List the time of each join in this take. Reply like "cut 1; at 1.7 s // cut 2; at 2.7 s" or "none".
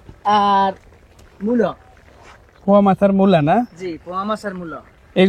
none